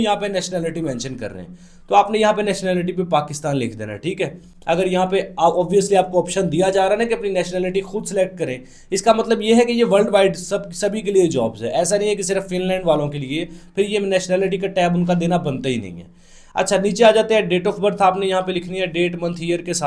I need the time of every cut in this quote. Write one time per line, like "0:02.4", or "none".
none